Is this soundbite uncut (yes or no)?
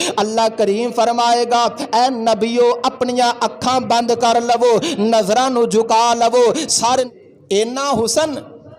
no